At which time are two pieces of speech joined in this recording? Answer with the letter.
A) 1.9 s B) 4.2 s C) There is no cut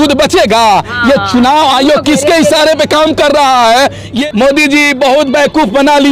B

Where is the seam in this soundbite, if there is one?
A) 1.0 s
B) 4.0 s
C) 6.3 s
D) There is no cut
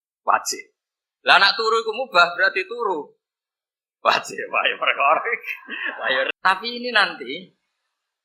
C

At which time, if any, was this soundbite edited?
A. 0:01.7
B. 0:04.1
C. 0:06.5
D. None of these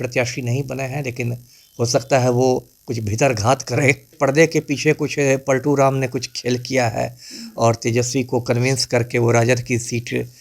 B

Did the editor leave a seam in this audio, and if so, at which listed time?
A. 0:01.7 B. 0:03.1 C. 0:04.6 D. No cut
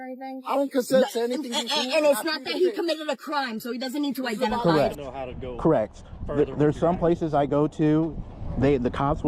C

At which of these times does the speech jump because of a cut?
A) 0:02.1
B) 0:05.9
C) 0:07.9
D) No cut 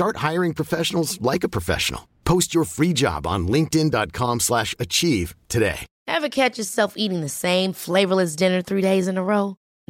B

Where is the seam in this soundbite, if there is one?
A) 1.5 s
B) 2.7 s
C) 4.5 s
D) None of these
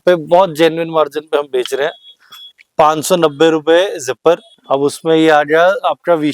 C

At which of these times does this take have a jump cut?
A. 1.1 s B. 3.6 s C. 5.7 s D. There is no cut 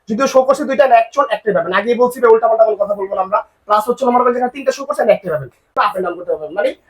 C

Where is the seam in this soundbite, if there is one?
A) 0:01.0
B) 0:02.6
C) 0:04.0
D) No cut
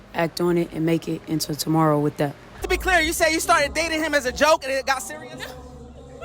B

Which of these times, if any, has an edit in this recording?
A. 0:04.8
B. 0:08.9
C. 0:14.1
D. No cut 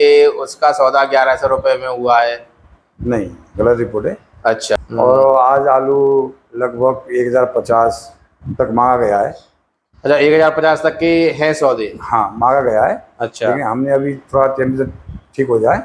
A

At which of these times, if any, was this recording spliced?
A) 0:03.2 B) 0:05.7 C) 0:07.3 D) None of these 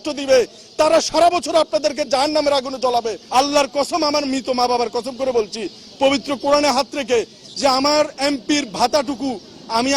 A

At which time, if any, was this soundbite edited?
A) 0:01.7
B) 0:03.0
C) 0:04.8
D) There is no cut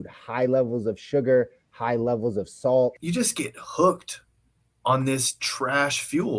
B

